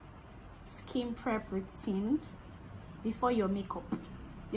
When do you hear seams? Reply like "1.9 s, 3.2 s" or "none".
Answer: none